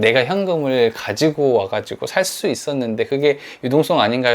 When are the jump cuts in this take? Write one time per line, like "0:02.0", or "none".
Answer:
none